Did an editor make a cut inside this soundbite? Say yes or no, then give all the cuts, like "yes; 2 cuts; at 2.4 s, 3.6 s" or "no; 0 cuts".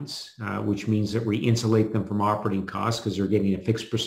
no; 0 cuts